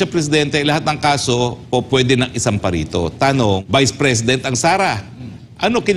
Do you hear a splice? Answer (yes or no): yes